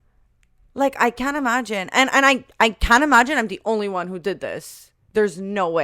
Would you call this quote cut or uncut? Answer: uncut